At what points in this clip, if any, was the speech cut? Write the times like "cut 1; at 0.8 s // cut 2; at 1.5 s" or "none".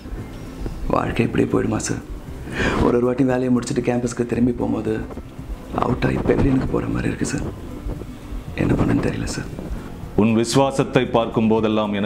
cut 1; at 9.6 s